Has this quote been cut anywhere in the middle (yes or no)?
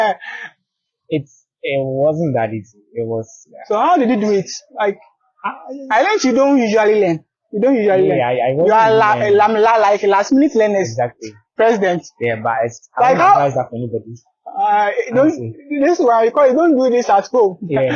no